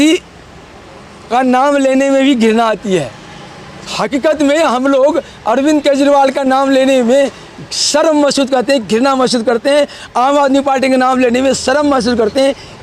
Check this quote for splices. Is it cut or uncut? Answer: uncut